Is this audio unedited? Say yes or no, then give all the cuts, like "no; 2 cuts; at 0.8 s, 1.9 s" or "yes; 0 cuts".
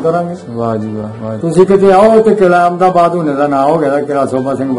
no; 1 cut; at 1.3 s